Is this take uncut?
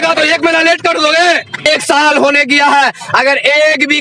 no; 1 cut; at 1.6 s

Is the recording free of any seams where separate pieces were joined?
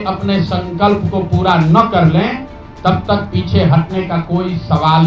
yes; 0 cuts

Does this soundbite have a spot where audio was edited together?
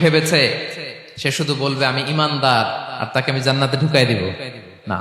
no; 0 cuts

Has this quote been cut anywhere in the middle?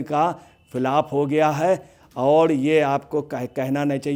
no; 0 cuts

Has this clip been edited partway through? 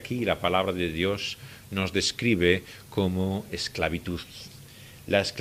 no; 0 cuts

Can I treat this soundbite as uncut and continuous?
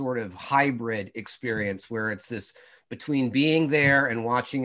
yes; 0 cuts

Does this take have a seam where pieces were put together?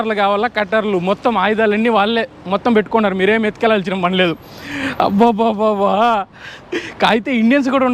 no; 0 cuts

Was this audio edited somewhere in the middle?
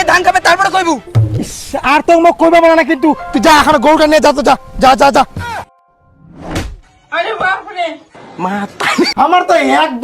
yes; 1 cut; at 9.1 s

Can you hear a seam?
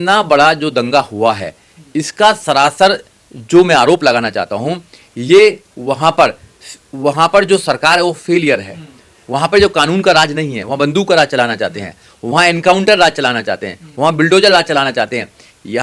no; 0 cuts

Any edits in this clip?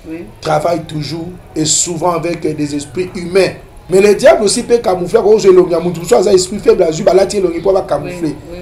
yes; 1 cut; at 3.7 s

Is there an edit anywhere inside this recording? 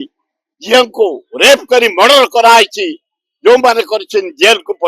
no; 0 cuts

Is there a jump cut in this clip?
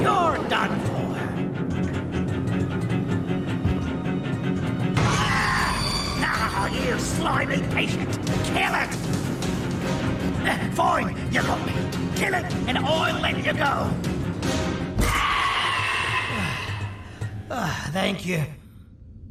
no; 0 cuts

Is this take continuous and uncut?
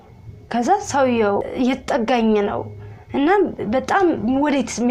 no; 1 cut; at 1.4 s

